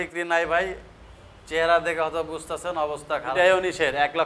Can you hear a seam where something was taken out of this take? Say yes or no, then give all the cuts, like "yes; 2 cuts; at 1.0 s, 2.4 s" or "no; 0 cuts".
yes; 1 cut; at 3.3 s